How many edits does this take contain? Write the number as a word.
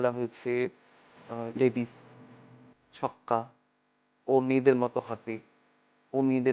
one